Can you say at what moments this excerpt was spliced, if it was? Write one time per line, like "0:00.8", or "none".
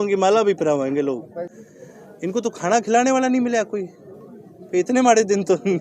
0:01.5